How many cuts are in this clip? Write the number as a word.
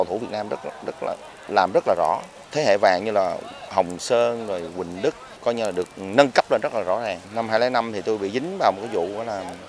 three